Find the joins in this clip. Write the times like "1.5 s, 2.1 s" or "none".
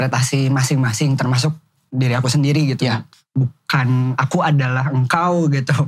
3.1 s